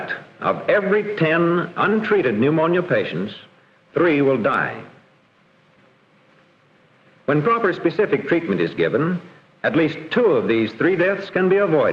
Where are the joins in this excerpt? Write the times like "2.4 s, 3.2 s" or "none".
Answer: 1.1 s